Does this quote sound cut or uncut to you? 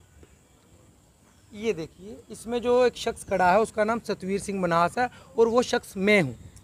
uncut